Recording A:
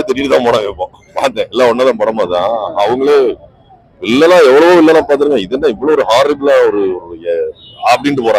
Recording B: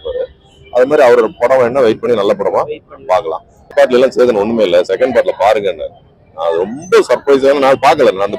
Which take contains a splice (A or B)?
B